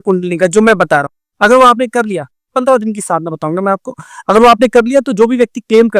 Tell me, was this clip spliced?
yes; 1 cut; at 1.2 s

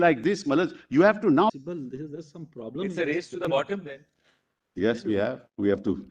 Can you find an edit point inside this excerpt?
yes; 1 cut; at 1.5 s

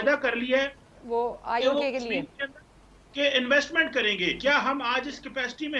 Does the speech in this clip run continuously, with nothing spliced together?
no; 1 cut; at 4.4 s

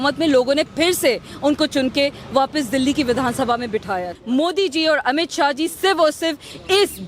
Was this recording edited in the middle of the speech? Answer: yes; 1 cut; at 4.1 s

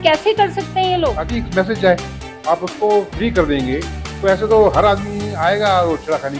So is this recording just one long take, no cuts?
no; 1 cut; at 1.2 s

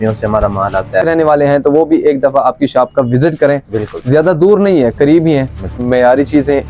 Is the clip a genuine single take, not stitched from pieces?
no; 2 cuts; at 1.0 s, 5.8 s

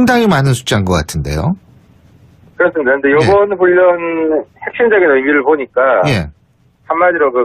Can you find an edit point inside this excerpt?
yes; 1 cut; at 3.5 s

